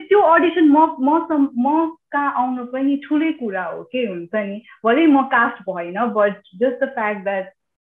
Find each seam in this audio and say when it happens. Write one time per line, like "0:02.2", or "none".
none